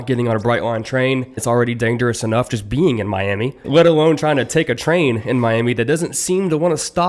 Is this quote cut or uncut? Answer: uncut